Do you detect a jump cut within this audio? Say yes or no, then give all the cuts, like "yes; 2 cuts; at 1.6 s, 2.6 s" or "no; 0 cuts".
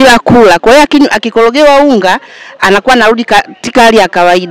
no; 0 cuts